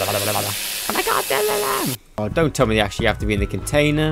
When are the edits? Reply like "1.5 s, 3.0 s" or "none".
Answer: 2.2 s

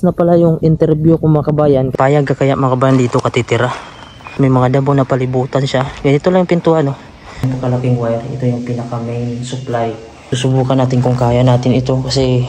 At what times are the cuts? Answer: 1.9 s, 4.3 s, 7.5 s, 10.2 s

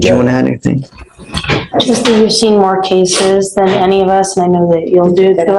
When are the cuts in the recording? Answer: none

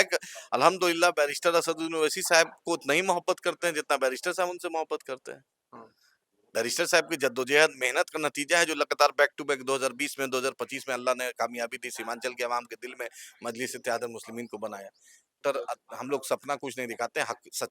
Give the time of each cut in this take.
15.4 s

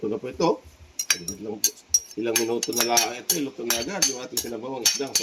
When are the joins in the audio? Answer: none

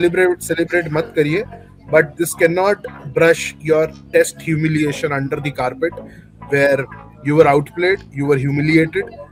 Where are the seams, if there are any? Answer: none

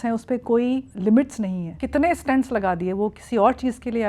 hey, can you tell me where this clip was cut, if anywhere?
0.9 s, 1.7 s

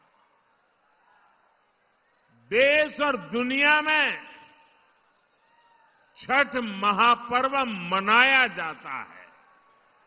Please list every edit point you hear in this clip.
6.9 s

